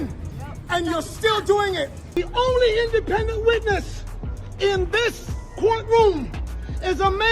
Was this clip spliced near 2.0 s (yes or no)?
yes